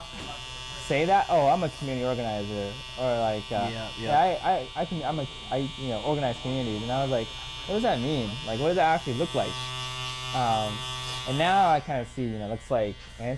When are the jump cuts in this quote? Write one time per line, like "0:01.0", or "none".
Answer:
none